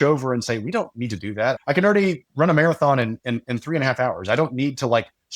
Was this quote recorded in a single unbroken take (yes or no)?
no